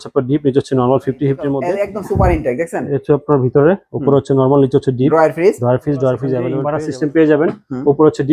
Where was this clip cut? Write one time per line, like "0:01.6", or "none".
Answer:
0:01.6
0:06.5